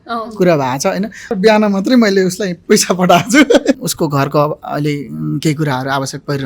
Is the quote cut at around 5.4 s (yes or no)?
no